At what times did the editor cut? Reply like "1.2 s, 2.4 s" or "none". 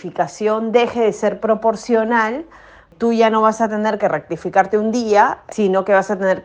2.9 s, 5.4 s